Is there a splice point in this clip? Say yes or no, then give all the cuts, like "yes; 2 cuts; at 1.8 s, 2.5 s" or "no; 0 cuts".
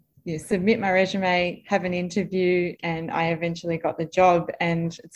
no; 0 cuts